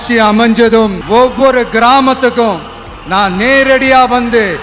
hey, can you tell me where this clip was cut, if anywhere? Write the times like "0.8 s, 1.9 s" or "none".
1.0 s